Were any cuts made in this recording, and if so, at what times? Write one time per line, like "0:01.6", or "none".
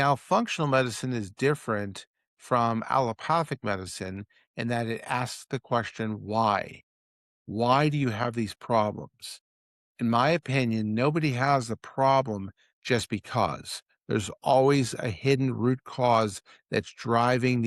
none